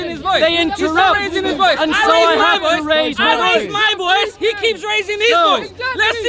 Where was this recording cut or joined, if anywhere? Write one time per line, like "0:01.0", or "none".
none